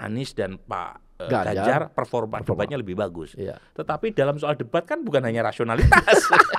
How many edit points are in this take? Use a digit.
0